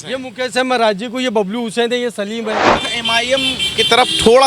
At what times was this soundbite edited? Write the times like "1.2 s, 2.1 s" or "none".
2.7 s